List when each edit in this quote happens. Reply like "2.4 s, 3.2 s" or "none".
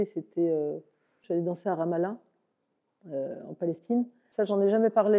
1.2 s, 4.2 s